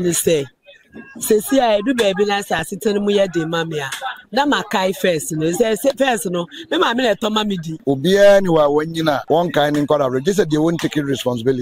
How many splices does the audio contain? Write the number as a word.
two